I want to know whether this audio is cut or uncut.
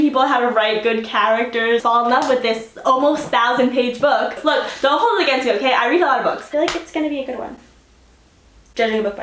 cut